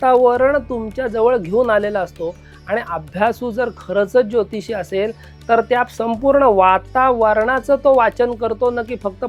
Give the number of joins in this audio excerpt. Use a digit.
0